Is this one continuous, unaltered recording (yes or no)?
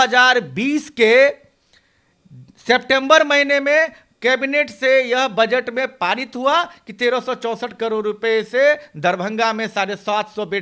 yes